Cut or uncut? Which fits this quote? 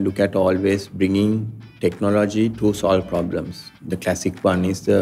uncut